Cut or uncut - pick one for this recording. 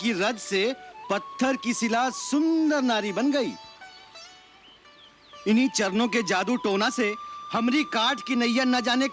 uncut